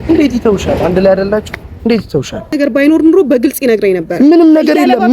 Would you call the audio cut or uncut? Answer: cut